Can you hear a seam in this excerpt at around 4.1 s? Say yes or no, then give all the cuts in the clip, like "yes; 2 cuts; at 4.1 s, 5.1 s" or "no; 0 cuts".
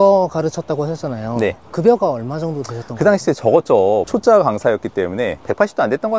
yes; 1 cut; at 4.1 s